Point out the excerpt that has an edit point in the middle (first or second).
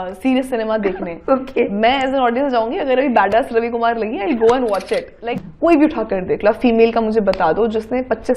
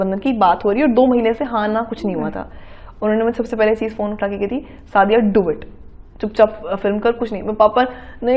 first